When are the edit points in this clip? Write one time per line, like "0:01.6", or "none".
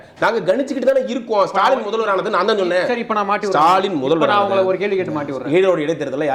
none

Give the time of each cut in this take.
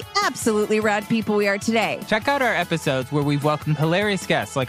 0:02.0

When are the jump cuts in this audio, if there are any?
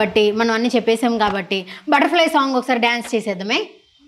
none

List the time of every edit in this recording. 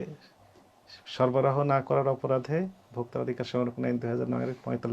none

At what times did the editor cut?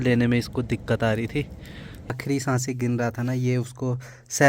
0:02.1

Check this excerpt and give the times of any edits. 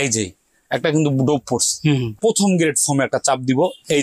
0:02.1

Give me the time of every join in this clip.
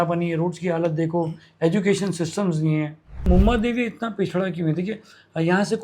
0:03.3

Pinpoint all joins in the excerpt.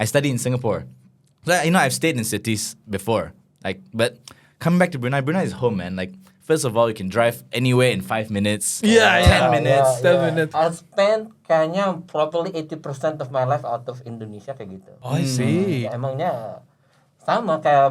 0:10.5
0:14.9
0:15.8

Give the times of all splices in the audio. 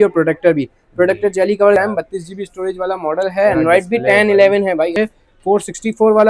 0:01.8
0:04.9

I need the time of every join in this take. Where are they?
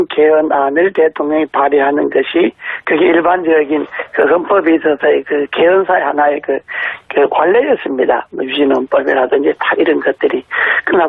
none

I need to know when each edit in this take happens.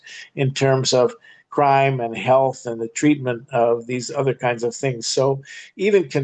none

